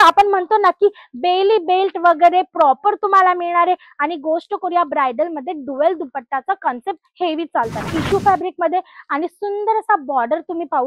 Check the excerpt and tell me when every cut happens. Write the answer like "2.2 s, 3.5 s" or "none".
8.0 s